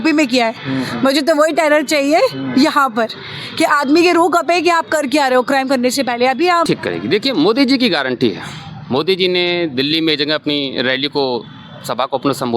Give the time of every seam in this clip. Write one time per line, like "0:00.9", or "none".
0:06.7